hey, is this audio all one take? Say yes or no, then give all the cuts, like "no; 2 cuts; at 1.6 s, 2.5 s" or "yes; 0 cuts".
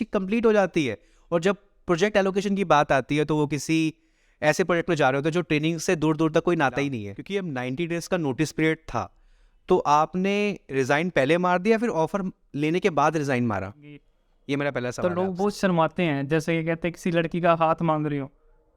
no; 2 cuts; at 7.1 s, 15.0 s